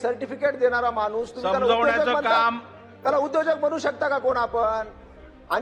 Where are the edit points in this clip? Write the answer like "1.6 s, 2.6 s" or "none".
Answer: none